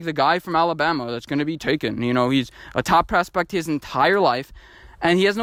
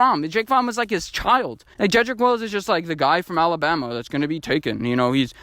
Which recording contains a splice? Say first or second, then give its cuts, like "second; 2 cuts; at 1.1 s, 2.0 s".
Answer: second; 1 cut; at 1.6 s